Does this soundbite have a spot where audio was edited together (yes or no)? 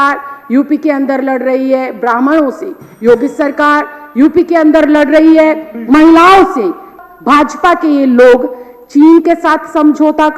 yes